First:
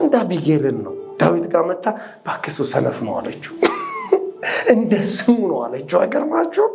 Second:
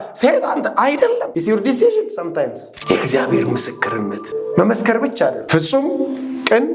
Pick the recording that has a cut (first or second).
second